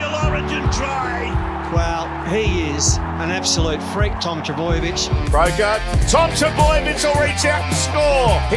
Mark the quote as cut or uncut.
uncut